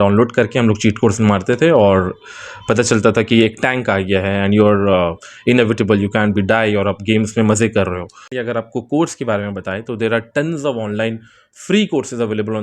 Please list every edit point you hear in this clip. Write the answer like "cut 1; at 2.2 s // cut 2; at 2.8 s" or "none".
cut 1; at 8.3 s